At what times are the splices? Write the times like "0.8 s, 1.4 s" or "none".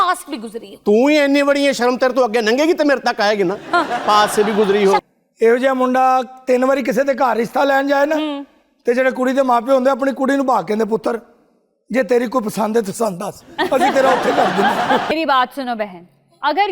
5.0 s, 15.1 s